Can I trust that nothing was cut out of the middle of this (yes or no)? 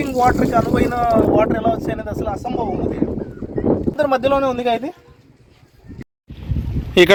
yes